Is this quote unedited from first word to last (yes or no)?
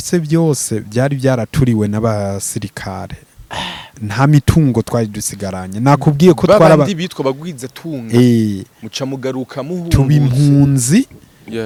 yes